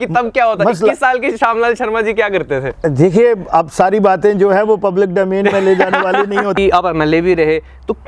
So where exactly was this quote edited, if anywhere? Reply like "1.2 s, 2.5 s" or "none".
6.6 s

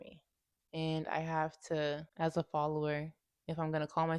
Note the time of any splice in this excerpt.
2.1 s

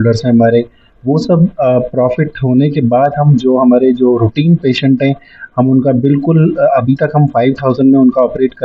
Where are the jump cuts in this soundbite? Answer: none

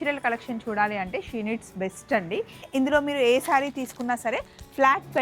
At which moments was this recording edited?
2.6 s

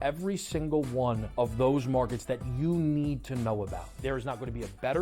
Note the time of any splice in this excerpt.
1.2 s, 4.0 s

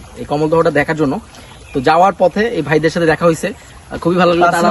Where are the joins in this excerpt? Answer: none

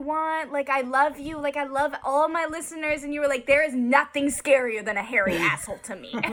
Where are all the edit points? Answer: none

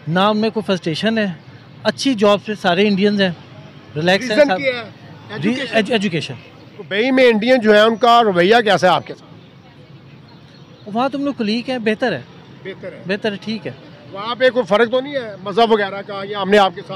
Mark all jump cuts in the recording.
6.9 s

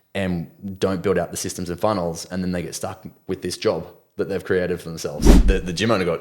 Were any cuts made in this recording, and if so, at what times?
5.3 s

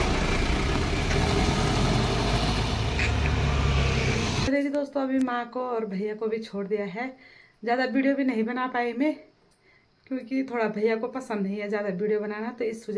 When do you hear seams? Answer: none

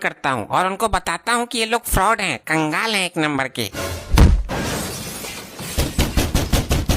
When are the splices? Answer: none

